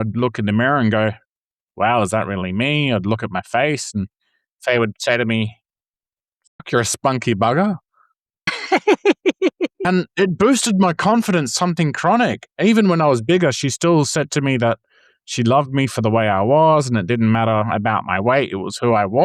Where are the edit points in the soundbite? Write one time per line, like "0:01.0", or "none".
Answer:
0:12.4